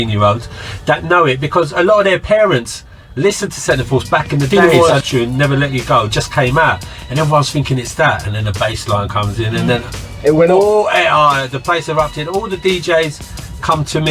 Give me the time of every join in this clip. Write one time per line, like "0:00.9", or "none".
0:04.5

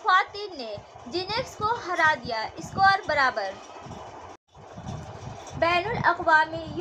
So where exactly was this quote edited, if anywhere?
0:04.5

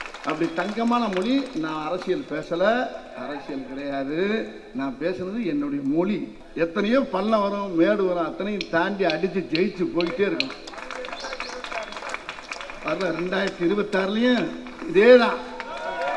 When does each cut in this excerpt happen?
0:06.4

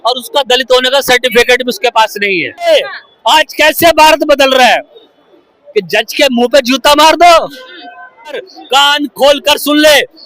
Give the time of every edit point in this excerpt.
0:02.7
0:08.5

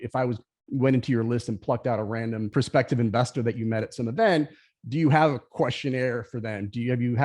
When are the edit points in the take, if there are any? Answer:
0:02.5

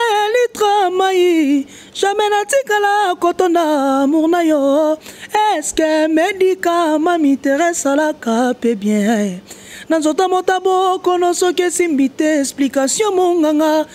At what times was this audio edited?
none

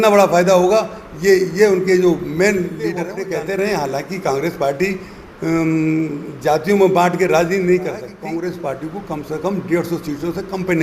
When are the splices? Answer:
0:03.1
0:08.1

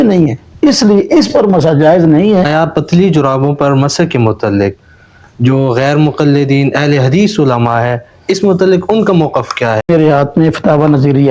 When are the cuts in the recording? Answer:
0:02.5
0:09.9

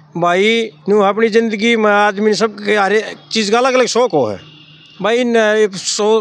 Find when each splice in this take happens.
none

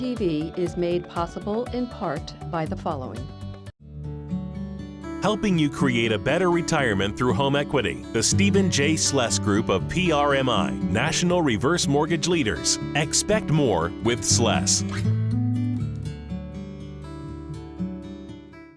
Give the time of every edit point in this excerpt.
none

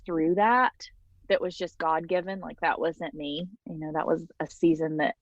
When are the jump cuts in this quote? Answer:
0:01.1

